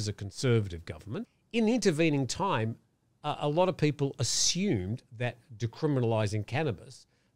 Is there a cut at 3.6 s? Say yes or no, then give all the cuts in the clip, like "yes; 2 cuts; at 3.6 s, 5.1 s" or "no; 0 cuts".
no; 1 cut; at 1.4 s